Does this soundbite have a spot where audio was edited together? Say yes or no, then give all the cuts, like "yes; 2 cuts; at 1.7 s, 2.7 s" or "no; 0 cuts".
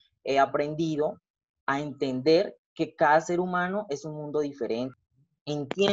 yes; 1 cut; at 5.0 s